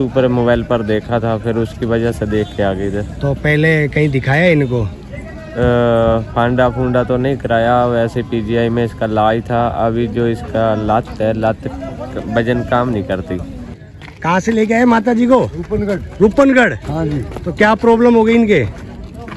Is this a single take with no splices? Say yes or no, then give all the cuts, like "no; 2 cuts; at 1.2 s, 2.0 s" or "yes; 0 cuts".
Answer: no; 1 cut; at 13.6 s